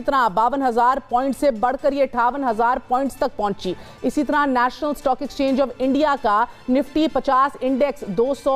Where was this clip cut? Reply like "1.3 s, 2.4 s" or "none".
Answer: none

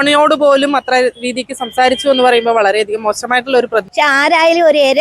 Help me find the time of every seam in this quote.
3.9 s

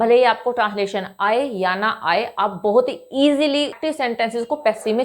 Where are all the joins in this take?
3.7 s

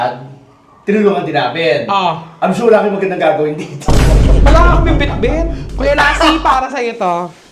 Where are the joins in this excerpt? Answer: 5.6 s

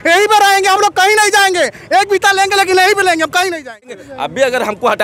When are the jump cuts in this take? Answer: 4.0 s

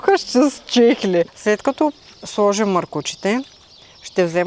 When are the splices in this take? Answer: 1.3 s

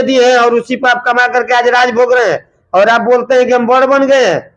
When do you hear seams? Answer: none

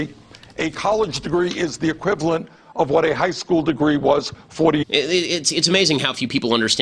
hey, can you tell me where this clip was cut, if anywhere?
none

